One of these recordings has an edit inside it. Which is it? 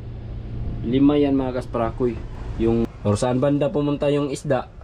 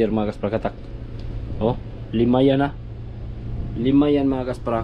first; 1 cut; at 2.8 s

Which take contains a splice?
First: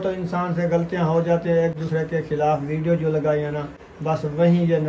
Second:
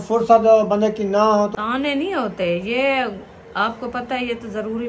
second; 1 cut; at 1.5 s

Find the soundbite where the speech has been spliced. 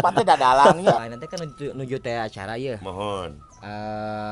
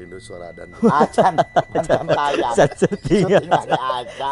first; 1 cut; at 1.0 s

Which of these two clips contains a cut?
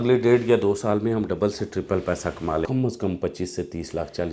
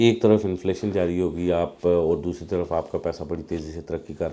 first; 1 cut; at 2.7 s

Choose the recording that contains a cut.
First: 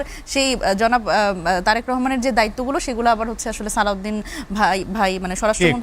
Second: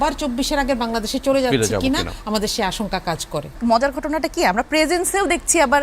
second; 1 cut; at 3.5 s

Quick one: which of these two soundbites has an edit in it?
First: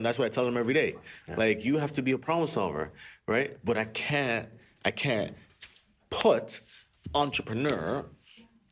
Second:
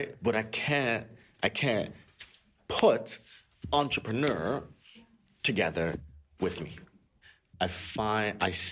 second; 1 cut; at 7.1 s

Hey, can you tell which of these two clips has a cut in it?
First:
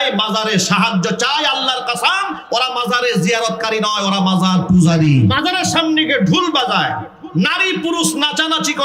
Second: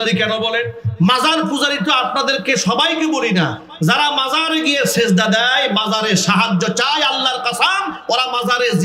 first; 1 cut; at 5.3 s

